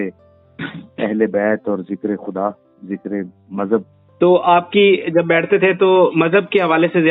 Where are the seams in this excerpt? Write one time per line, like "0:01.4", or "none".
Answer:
none